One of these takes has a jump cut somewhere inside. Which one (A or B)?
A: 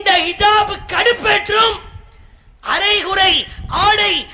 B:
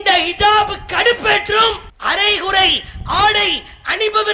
B